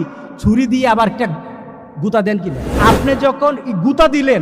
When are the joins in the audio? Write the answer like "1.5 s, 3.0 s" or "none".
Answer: 2.7 s